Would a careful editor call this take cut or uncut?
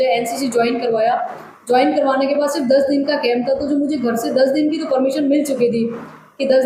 uncut